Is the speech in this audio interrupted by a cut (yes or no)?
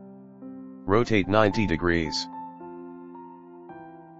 no